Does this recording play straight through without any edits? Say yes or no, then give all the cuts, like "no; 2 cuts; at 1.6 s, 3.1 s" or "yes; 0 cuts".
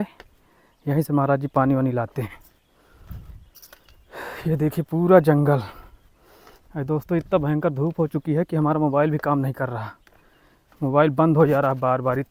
yes; 0 cuts